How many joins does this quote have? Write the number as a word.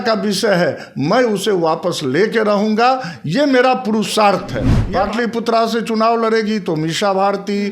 one